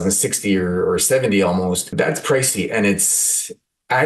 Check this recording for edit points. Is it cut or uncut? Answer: cut